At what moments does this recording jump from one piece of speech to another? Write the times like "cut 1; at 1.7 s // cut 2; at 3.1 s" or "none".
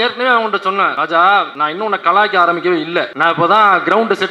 cut 1; at 1.0 s // cut 2; at 1.6 s // cut 3; at 3.1 s

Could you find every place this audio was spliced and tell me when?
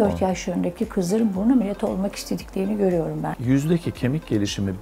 cut 1; at 3.3 s

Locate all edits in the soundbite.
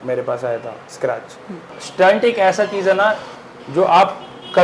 cut 1; at 1.7 s

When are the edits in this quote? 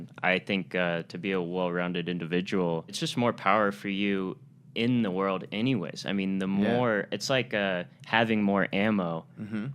cut 1; at 3.0 s

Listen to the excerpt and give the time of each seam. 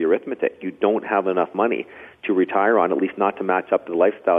none

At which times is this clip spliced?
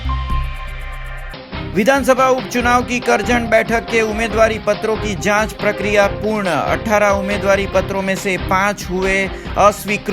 cut 1; at 1.2 s

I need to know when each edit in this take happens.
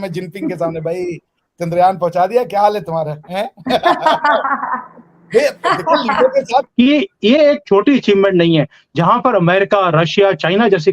cut 1; at 6.7 s

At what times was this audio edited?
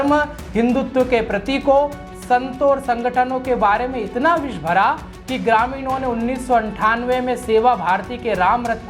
none

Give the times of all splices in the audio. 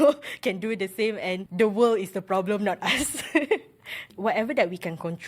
cut 1; at 1.5 s // cut 2; at 4.1 s

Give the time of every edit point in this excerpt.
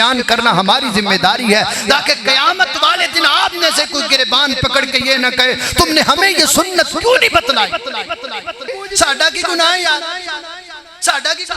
cut 1; at 8.7 s

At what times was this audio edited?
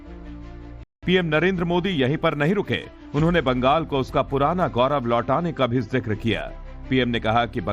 none

